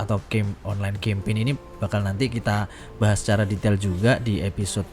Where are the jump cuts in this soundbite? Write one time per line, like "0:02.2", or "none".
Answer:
none